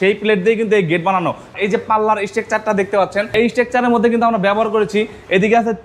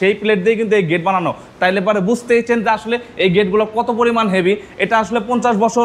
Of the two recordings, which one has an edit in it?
first; 2 cuts; at 1.5 s, 3.3 s

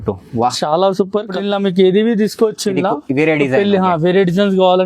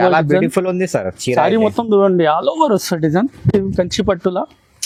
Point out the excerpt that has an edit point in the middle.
first; 1 cut; at 1.3 s

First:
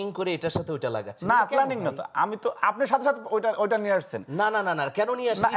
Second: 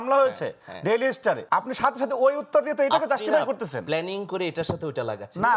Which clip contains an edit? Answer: second; 1 cut; at 1.4 s

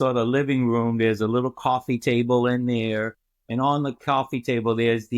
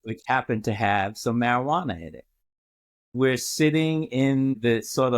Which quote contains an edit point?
second; 1 cut; at 3.1 s

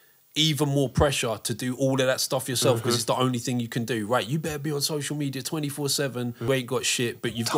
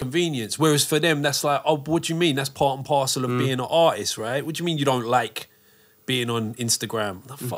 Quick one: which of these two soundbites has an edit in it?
first; 1 cut; at 6.5 s

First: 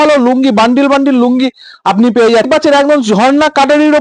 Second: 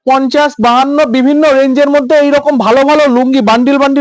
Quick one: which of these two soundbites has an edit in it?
first; 1 cut; at 2.5 s

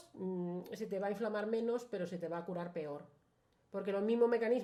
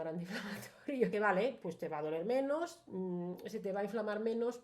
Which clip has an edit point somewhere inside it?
second; 1 cut; at 1.1 s

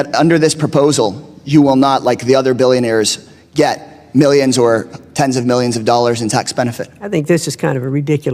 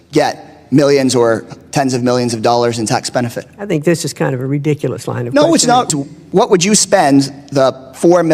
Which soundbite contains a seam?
second; 1 cut; at 5.9 s

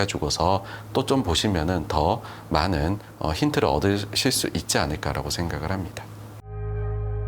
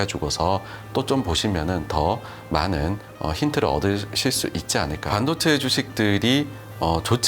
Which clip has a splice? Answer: second; 1 cut; at 5.1 s

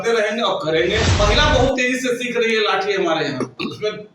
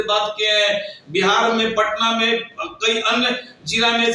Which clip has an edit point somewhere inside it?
first; 1 cut; at 1.1 s

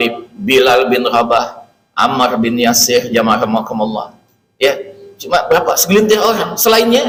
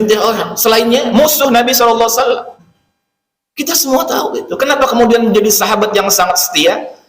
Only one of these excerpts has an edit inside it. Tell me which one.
second; 1 cut; at 2.6 s

